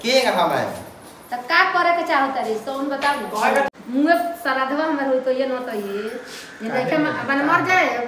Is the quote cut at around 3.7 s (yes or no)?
yes